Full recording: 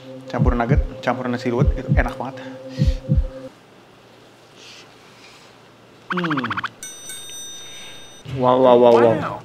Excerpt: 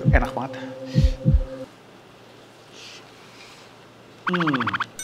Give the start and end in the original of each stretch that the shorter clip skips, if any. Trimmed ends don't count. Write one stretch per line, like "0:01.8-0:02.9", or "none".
none

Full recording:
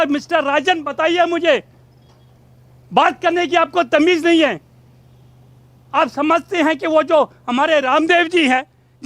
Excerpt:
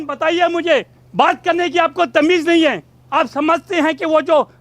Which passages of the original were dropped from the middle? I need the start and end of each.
0:01.8-0:02.8
0:04.7-0:05.7

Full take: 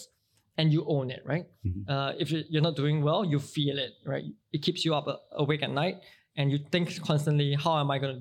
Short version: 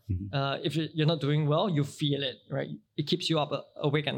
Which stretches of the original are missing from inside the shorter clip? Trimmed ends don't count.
none

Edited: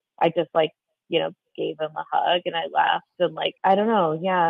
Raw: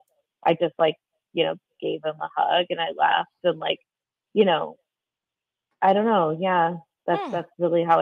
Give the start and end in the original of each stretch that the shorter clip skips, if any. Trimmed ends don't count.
0:03.7-0:05.6

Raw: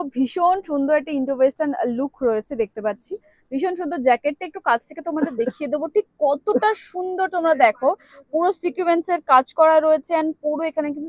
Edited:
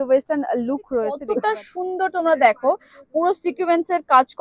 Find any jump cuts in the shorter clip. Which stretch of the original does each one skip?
0:02.5-0:06.4

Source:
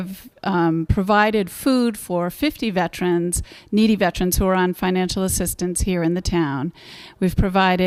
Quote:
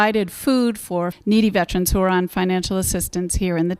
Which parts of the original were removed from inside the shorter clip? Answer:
0:02.3-0:03.6

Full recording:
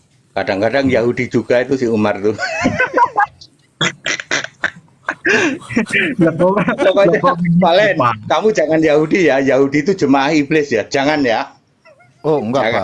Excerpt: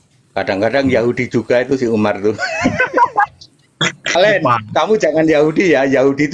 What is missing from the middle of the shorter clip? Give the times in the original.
0:04.1-0:07.7

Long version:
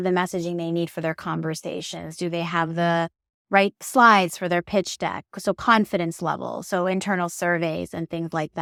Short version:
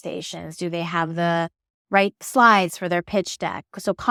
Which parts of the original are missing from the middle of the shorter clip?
none

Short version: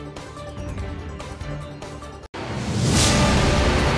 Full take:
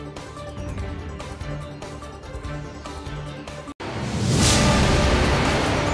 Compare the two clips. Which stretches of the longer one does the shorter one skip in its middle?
0:02.3-0:03.7

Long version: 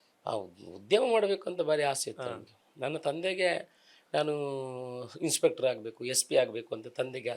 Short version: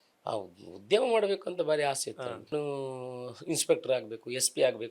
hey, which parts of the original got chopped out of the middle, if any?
0:02.5-0:04.3

